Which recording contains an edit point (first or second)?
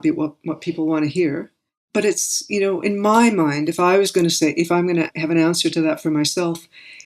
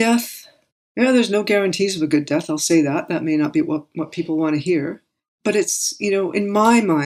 first